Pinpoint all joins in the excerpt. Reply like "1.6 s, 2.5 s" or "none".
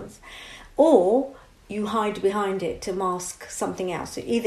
none